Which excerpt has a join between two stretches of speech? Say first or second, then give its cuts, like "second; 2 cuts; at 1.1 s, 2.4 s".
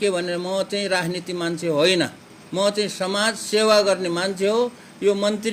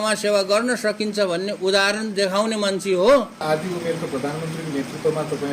second; 1 cut; at 3.4 s